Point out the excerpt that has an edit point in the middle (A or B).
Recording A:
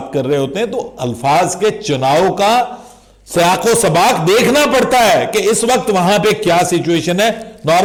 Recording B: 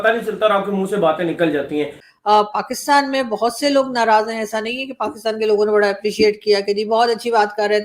B